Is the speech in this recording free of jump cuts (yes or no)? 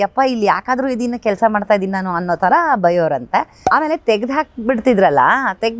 no